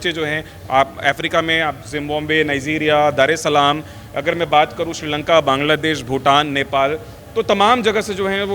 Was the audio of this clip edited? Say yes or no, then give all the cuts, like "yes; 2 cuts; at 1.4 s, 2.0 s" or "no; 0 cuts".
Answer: no; 0 cuts